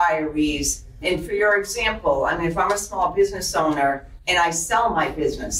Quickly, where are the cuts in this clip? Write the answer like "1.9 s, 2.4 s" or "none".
1.0 s, 4.1 s